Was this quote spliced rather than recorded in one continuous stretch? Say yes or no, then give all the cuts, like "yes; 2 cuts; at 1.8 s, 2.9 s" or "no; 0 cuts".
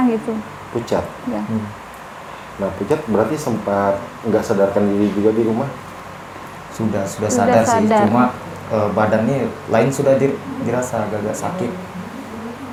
no; 0 cuts